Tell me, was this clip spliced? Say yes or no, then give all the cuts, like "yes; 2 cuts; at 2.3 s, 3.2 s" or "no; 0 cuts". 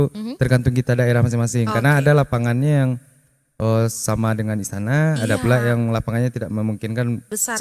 no; 0 cuts